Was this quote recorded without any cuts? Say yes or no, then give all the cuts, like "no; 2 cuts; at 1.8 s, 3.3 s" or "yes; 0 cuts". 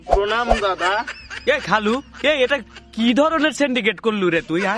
yes; 0 cuts